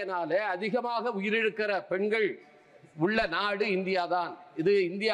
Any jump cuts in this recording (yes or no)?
no